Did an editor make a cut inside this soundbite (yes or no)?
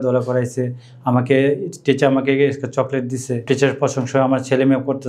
yes